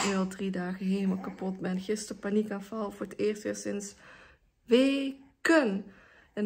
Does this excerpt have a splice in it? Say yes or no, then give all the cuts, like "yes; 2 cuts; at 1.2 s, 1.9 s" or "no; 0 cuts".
no; 0 cuts